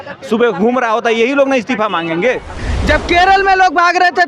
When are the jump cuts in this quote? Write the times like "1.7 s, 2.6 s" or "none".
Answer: 2.6 s